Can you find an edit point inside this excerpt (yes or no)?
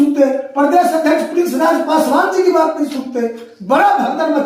no